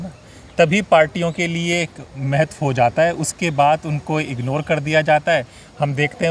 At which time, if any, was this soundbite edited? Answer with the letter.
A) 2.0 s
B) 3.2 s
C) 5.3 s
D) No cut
D